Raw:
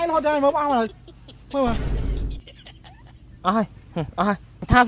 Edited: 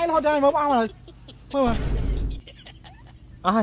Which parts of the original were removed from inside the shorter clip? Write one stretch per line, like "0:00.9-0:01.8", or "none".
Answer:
none